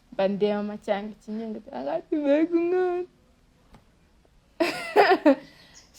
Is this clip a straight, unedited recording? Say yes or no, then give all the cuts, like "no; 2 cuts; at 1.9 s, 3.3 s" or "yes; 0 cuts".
yes; 0 cuts